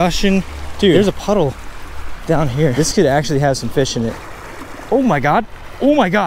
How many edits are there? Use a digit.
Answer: 1